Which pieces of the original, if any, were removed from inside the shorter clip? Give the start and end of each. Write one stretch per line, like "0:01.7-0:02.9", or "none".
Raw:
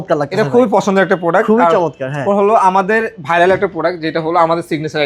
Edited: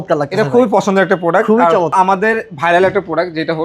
0:01.9-0:02.6